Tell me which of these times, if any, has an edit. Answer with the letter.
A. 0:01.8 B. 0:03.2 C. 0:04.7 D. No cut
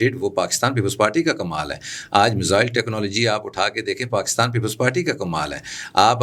D